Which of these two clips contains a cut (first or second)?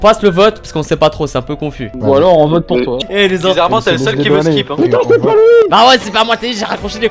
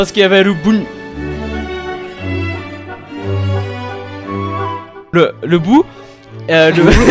first